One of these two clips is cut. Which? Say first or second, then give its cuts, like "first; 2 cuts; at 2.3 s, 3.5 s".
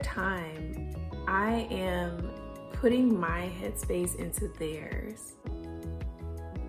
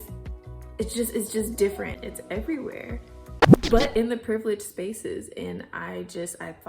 second; 1 cut; at 2.0 s